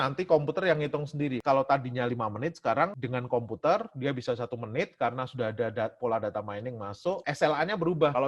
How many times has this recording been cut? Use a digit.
3